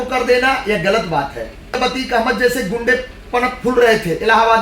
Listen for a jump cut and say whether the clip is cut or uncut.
cut